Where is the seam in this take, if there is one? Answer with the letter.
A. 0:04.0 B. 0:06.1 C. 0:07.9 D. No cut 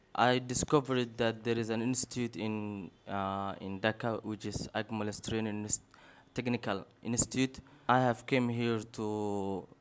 C